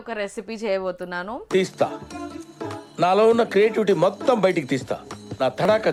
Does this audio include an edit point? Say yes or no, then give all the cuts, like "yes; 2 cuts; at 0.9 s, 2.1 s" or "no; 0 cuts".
no; 0 cuts